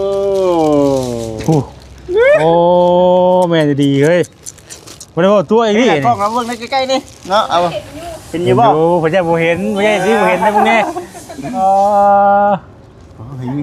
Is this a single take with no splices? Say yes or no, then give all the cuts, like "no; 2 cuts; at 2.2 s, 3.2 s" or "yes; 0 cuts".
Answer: yes; 0 cuts